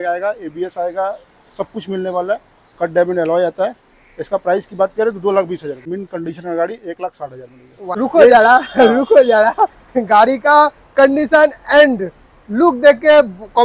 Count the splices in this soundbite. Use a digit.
2